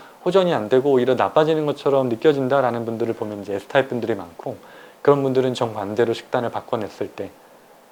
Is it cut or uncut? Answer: uncut